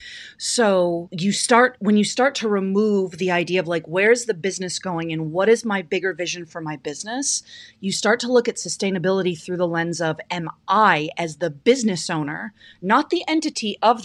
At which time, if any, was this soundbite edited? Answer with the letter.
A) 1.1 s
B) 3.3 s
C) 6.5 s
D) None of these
A